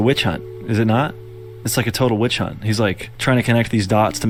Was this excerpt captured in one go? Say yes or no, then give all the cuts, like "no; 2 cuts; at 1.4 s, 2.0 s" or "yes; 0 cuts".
yes; 0 cuts